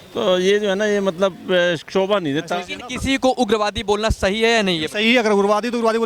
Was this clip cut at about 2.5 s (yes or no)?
yes